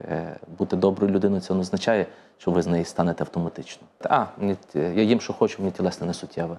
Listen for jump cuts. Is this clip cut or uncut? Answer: cut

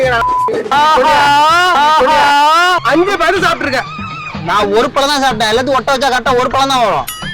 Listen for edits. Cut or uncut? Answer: cut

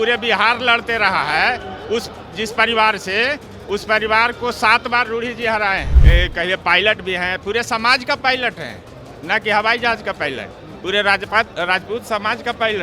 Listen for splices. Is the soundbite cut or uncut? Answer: cut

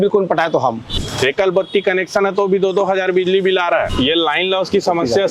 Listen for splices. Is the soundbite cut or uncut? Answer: cut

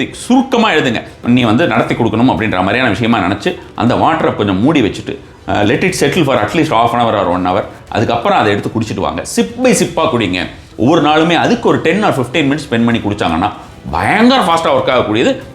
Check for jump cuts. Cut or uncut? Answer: cut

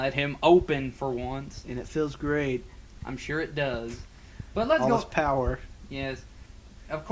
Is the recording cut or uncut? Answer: uncut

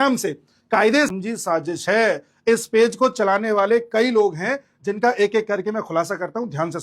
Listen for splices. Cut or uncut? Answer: cut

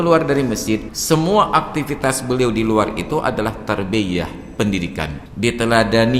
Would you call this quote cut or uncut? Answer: cut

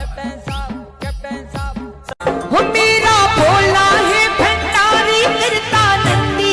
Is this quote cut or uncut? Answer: cut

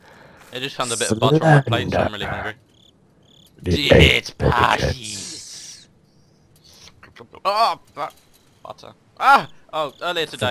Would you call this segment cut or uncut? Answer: uncut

